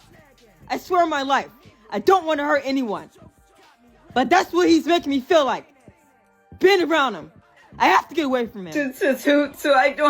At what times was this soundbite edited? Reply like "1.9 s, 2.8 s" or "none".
8.6 s